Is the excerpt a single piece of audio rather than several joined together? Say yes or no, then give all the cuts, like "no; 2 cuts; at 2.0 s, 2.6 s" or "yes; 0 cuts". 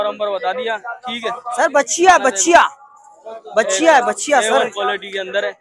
yes; 0 cuts